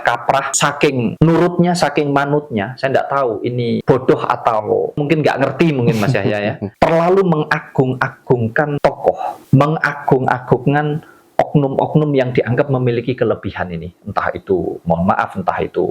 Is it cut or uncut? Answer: cut